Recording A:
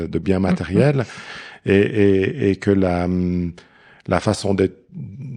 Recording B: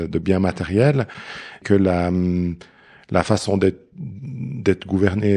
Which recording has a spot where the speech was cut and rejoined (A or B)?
B